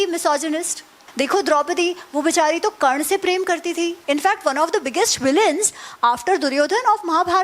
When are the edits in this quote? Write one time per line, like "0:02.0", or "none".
0:01.0
0:04.0